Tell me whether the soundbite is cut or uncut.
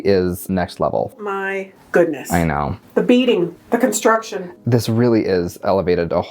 cut